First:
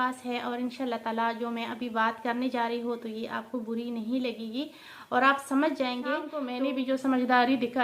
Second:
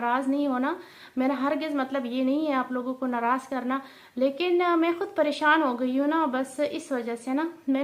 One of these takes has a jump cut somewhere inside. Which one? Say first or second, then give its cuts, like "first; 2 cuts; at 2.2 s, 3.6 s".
first; 1 cut; at 6.4 s